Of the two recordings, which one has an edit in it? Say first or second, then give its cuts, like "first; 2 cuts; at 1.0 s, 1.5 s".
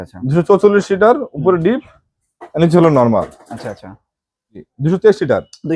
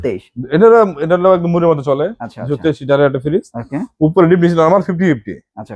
first; 1 cut; at 4.7 s